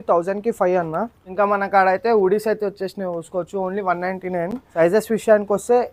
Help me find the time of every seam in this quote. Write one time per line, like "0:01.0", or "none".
0:01.2
0:04.6